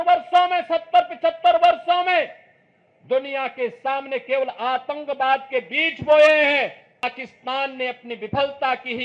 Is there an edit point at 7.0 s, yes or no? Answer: yes